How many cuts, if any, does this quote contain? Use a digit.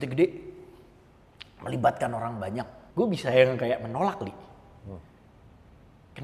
1